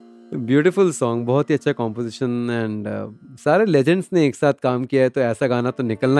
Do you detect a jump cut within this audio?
no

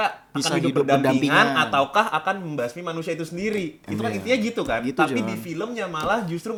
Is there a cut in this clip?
no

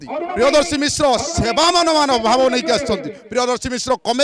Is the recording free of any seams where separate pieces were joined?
yes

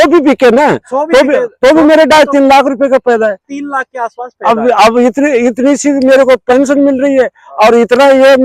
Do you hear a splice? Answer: no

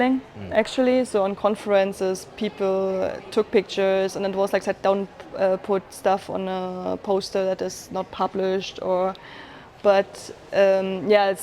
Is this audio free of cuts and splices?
no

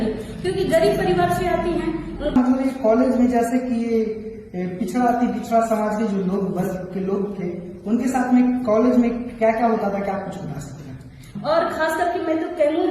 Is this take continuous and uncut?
no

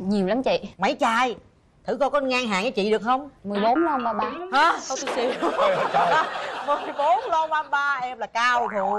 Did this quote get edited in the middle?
no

